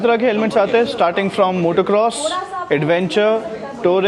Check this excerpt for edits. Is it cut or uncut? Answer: uncut